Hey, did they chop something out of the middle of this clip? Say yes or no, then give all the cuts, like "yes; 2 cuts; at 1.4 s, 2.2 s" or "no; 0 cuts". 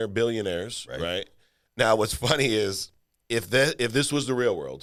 no; 0 cuts